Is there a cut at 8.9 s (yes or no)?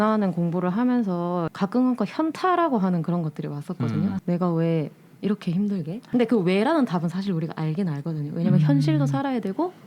no